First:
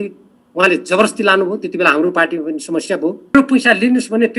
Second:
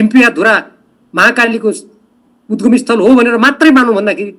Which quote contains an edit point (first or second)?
first